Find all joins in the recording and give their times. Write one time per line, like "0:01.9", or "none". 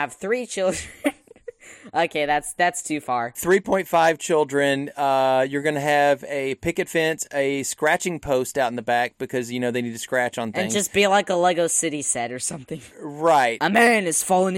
none